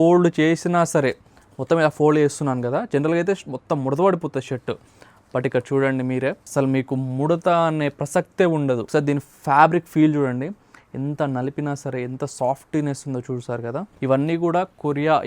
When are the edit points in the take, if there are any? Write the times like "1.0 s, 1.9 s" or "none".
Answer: 6.4 s, 8.8 s, 13.9 s